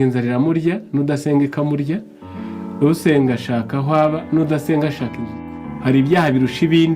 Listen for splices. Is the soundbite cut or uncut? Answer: cut